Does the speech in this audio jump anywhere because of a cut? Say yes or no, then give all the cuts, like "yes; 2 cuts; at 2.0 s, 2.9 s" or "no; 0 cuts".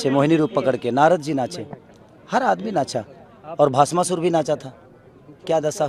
no; 0 cuts